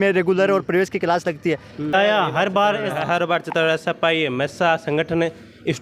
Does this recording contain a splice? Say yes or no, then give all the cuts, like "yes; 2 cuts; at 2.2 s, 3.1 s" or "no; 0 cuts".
yes; 1 cut; at 1.9 s